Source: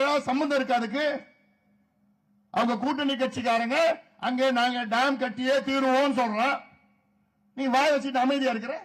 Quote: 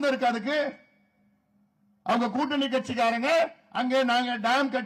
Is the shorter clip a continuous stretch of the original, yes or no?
yes